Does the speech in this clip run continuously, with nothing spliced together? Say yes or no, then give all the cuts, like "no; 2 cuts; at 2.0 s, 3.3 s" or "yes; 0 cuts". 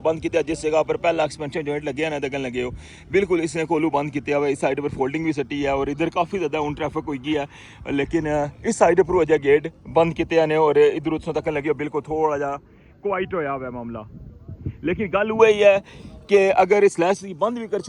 yes; 0 cuts